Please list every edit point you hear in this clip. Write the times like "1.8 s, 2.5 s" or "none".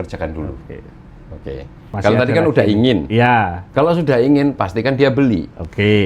1.8 s, 3.6 s